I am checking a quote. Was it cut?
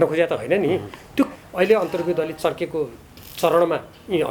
yes; 1 cut; at 1.3 s

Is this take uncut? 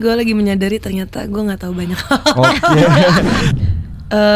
no; 1 cut; at 3.4 s

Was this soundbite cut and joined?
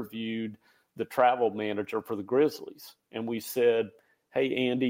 no; 0 cuts

